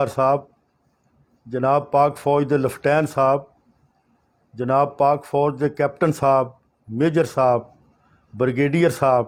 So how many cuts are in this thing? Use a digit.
0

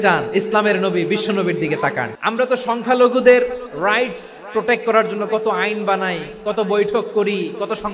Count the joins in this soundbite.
1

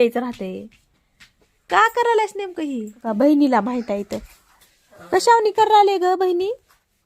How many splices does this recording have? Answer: 1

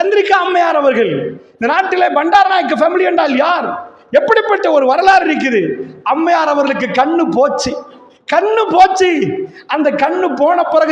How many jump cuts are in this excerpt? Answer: 1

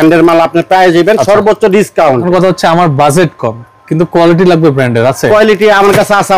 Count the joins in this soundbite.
1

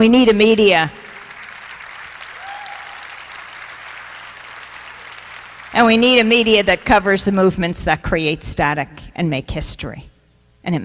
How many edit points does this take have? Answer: 0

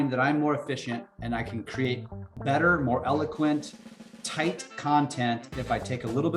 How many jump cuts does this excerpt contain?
1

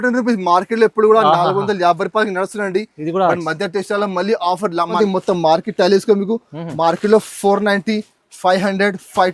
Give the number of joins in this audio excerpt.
1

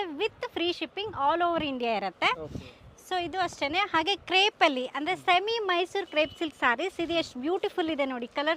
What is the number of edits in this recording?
0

